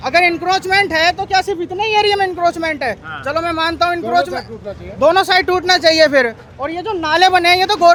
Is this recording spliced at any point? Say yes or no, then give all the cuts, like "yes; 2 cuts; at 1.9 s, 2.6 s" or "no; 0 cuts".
no; 0 cuts